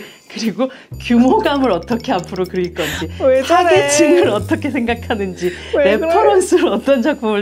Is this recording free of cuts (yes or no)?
yes